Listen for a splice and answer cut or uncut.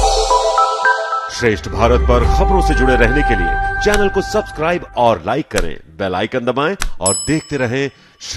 uncut